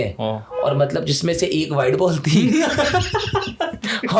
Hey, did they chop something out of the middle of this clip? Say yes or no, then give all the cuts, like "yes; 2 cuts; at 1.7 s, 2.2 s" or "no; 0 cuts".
no; 0 cuts